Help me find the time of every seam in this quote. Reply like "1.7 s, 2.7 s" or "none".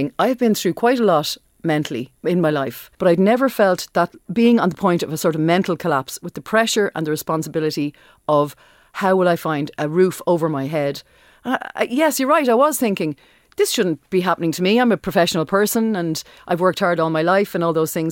2.0 s, 2.8 s, 4.2 s, 9.7 s